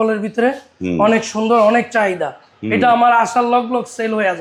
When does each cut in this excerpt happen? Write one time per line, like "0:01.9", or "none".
none